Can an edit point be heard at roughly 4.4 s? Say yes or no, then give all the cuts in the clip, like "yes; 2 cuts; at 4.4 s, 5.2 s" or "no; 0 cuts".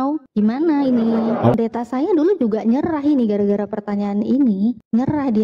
no; 1 cut; at 1.6 s